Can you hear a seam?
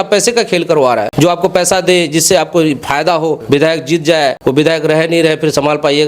yes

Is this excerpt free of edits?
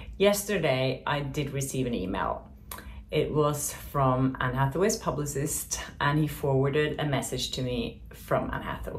yes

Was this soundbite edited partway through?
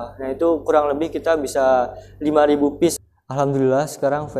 yes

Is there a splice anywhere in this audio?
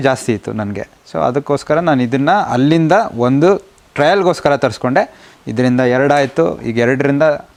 no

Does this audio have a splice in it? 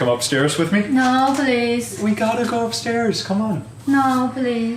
no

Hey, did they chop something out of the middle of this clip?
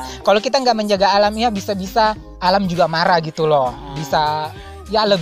yes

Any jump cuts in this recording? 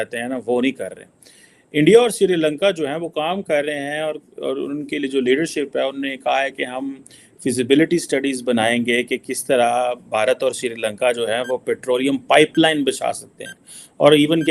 no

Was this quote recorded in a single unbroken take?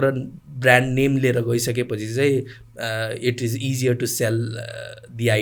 yes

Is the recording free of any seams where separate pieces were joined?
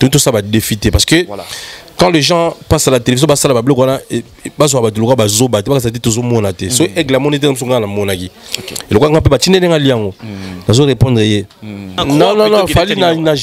no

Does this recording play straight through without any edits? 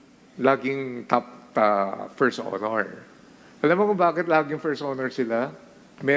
yes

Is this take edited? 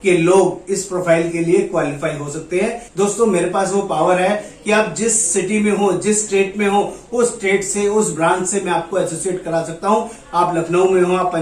yes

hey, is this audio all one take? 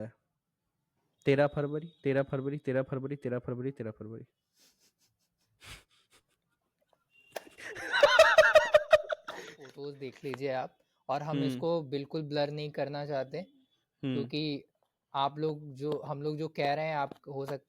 no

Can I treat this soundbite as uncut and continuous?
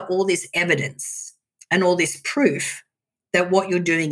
yes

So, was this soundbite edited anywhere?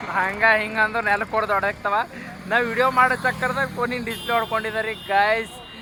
no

